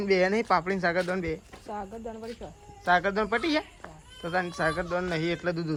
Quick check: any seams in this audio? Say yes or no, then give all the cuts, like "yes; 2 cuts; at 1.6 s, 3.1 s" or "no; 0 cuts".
no; 0 cuts